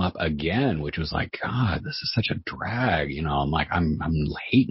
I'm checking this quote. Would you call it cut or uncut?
uncut